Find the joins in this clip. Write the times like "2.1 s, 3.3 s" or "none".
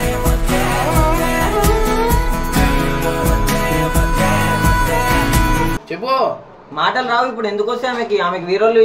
5.8 s